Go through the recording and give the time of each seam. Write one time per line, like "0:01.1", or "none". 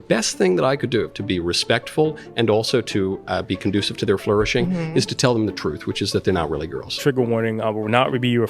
0:07.0